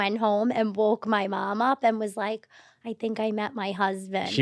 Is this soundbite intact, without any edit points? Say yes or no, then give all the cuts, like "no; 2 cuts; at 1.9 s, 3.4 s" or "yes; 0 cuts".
yes; 0 cuts